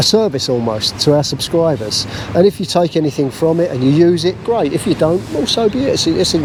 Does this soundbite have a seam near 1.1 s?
no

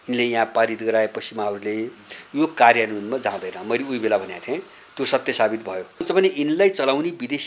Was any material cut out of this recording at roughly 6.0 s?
yes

